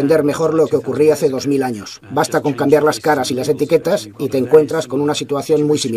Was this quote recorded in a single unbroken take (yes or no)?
no